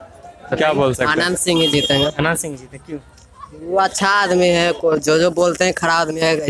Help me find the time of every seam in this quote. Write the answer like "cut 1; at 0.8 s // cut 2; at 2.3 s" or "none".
none